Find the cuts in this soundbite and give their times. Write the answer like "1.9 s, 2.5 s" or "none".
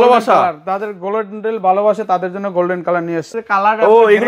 3.3 s